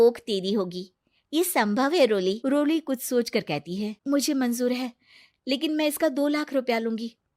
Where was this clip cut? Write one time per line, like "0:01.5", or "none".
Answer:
0:02.4
0:03.9